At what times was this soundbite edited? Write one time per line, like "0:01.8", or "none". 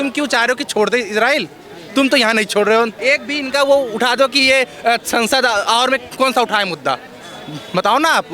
0:03.0

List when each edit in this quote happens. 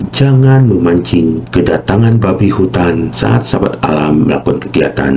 0:01.4
0:03.1

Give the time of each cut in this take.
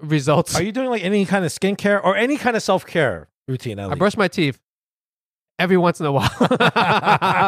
none

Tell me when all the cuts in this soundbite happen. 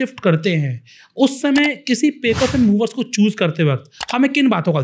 none

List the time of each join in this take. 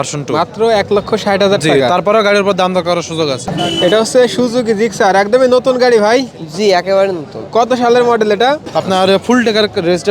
0:03.4
0:08.7

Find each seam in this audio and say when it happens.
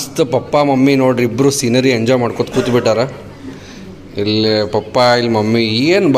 none

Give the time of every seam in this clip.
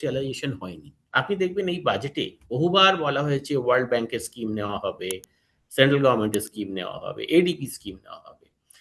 0:01.0

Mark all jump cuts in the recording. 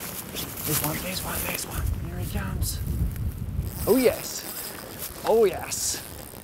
0:01.8
0:03.7

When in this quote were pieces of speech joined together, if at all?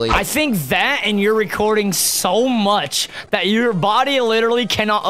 none

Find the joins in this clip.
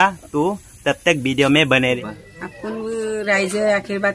0:02.1

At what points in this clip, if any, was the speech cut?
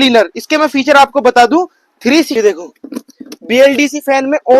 0:02.3

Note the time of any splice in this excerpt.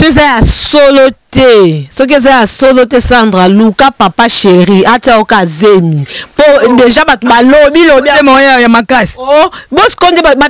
none

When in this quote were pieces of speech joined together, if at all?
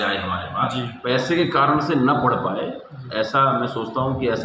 0:01.0

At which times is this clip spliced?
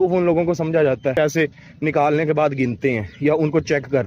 0:01.1

